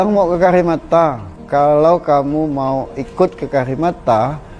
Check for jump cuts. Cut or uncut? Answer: cut